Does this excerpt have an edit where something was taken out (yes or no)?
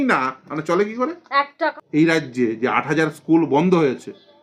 yes